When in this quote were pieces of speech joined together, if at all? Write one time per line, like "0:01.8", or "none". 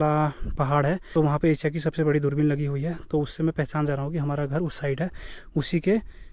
0:01.3